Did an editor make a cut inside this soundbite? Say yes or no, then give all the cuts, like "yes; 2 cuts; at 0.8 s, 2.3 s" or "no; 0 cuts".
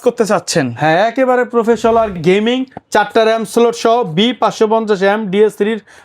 yes; 1 cut; at 2.1 s